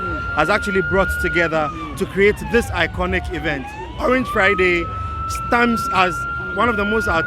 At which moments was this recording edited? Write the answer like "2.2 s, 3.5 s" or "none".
none